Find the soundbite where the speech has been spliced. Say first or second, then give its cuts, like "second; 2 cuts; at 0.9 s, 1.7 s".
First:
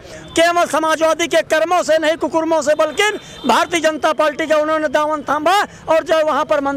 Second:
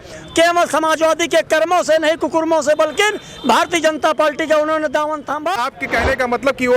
second; 1 cut; at 5.5 s